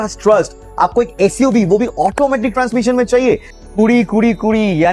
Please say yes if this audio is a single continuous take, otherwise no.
no